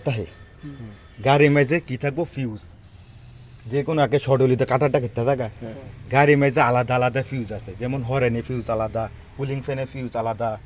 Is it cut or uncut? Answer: uncut